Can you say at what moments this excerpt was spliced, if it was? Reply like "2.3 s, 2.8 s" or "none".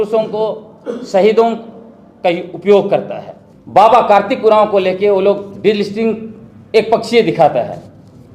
none